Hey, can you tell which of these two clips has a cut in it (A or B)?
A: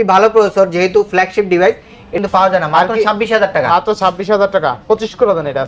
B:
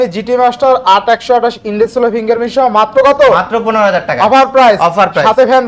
A